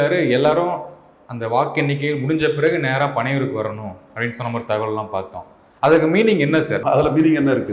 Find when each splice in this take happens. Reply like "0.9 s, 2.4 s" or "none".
6.8 s